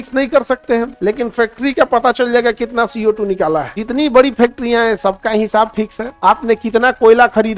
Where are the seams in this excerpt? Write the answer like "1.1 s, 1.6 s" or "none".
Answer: 0.9 s, 3.7 s, 6.0 s

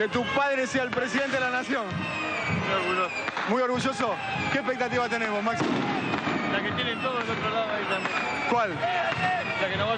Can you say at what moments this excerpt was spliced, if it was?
none

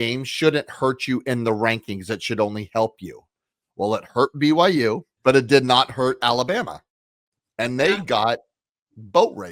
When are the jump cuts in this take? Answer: 5.1 s

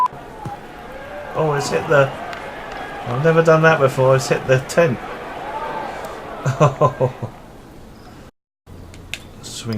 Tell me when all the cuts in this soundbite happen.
8.5 s

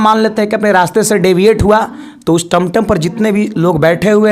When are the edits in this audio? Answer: none

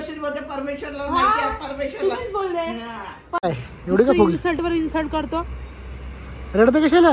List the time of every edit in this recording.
3.4 s

